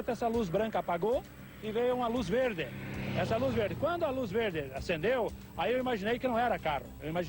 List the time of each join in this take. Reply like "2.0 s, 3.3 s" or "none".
2.3 s